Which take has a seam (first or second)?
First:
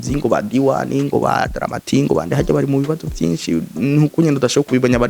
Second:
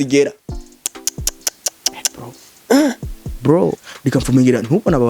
second